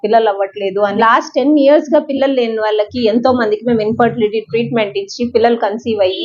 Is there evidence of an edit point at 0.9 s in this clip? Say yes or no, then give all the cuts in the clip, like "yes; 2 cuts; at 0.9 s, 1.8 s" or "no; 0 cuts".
yes; 1 cut; at 0.9 s